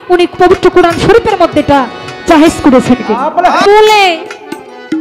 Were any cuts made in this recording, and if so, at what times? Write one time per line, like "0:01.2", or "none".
0:03.6